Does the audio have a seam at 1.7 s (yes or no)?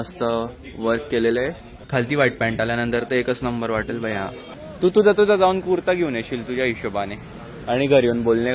yes